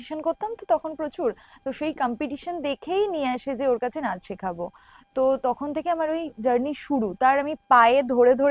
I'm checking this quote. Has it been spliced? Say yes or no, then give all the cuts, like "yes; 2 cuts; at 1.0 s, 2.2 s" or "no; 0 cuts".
no; 0 cuts